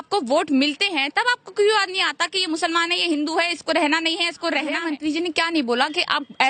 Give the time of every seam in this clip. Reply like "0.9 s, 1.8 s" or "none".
4.8 s